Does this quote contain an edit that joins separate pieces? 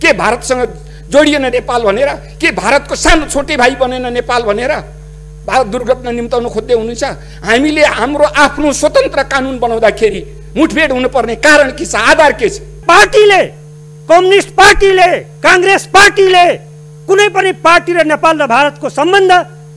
yes; 1 cut; at 12.8 s

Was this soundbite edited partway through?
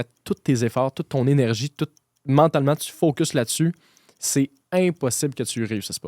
no; 0 cuts

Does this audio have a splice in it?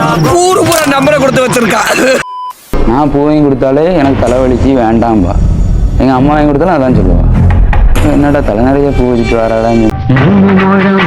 yes; 1 cut; at 2.5 s

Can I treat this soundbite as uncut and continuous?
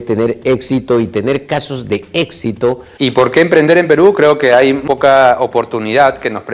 no; 2 cuts; at 2.9 s, 4.8 s

